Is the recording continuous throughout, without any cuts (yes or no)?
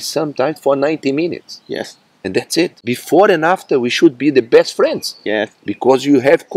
no